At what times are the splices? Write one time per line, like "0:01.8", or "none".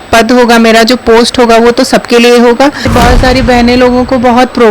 0:02.9